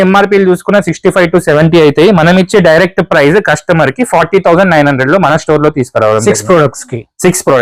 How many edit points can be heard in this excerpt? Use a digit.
0